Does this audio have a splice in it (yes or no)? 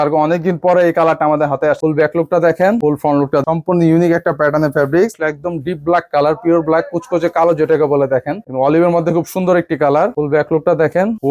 yes